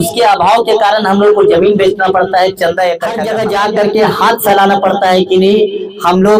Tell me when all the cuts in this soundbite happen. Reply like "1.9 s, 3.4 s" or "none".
3.2 s

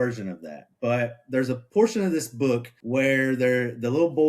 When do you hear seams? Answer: 1.6 s, 2.7 s

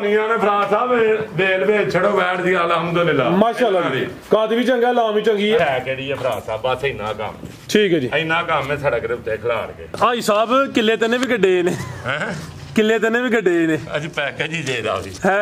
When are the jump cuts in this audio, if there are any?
5.6 s, 9.8 s

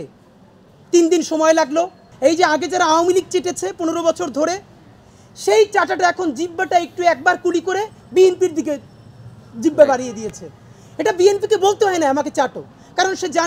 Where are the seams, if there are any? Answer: 2.0 s

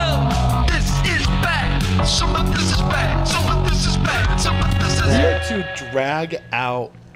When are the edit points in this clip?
none

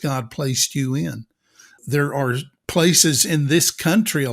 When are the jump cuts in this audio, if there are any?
1.8 s, 2.5 s

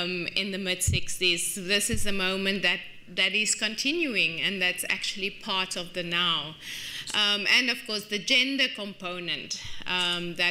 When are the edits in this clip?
1.1 s

